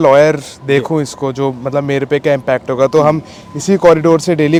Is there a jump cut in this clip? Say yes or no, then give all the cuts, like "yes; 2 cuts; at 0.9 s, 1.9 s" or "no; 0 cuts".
no; 0 cuts